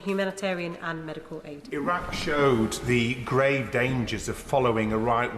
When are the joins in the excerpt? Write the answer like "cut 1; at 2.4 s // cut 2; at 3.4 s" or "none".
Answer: cut 1; at 1.7 s